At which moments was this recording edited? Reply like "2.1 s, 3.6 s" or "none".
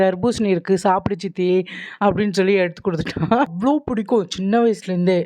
3.5 s